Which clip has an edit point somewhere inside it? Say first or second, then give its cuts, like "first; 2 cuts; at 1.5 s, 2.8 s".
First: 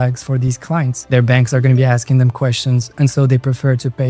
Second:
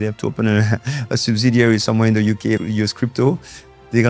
second; 1 cut; at 2.6 s